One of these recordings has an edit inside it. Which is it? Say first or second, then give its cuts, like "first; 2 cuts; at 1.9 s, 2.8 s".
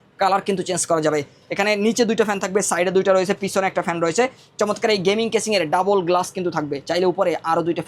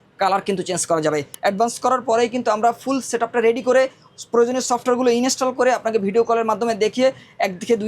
second; 1 cut; at 1.3 s